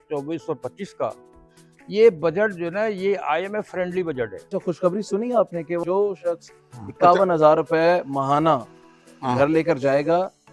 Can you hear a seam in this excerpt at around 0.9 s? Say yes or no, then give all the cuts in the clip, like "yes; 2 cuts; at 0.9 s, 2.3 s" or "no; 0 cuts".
no; 2 cuts; at 4.4 s, 5.8 s